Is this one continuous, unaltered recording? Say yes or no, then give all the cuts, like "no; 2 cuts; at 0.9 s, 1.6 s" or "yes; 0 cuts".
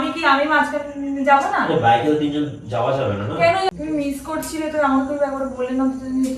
no; 1 cut; at 3.7 s